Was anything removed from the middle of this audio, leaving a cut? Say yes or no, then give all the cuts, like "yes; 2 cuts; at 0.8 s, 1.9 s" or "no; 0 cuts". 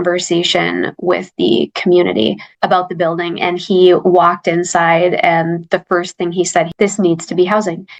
no; 0 cuts